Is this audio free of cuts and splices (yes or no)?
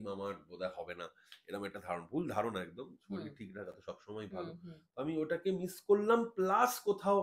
yes